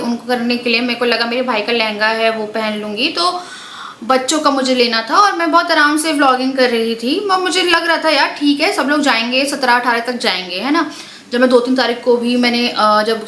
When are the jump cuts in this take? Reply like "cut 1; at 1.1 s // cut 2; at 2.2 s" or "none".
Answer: none